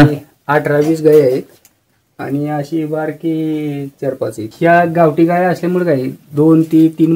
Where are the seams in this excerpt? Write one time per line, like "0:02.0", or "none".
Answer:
0:04.4